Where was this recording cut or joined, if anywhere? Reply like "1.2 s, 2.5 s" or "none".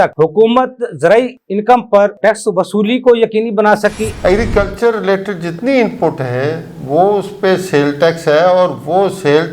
4.1 s